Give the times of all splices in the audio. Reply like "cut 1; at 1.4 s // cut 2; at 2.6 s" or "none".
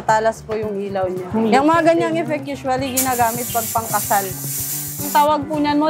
cut 1; at 1.2 s // cut 2; at 5.0 s